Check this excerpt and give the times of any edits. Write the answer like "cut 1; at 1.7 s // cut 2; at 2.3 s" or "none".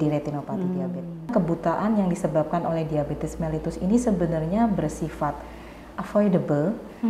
cut 1; at 1.3 s